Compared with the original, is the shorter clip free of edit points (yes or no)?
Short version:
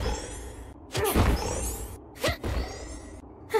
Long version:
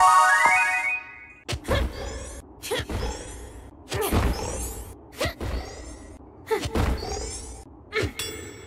yes